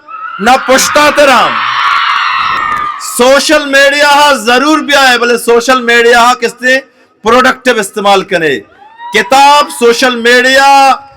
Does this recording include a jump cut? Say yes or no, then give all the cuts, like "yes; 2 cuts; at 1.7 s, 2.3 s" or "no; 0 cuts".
yes; 1 cut; at 2.6 s